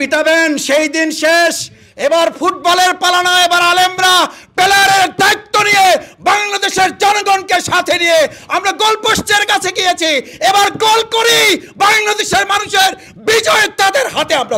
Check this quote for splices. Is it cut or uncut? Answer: uncut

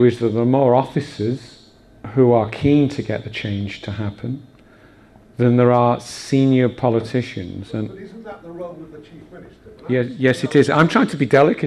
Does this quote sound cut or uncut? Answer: cut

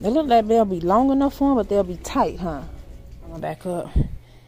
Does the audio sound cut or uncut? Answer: cut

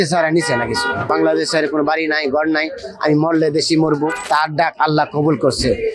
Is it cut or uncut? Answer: cut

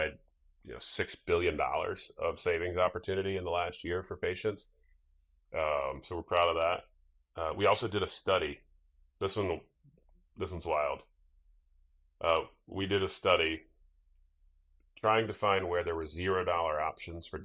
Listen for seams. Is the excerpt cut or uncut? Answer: uncut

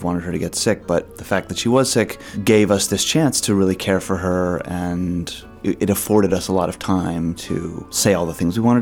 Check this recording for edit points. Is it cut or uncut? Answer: cut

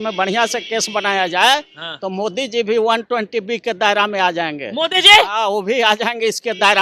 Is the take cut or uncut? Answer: uncut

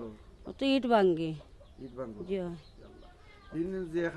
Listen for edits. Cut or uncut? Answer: uncut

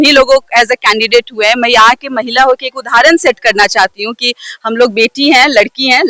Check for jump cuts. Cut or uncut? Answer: uncut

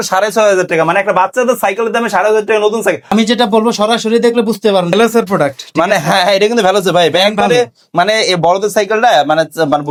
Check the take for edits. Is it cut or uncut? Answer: uncut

